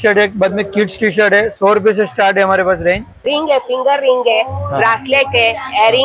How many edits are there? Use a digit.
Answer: 1